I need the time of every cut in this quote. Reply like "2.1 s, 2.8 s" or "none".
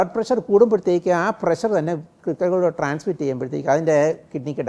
none